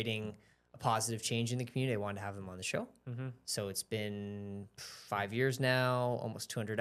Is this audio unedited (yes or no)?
yes